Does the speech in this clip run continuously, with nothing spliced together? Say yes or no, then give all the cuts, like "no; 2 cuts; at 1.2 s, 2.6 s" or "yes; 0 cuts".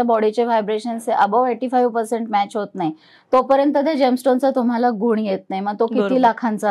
yes; 0 cuts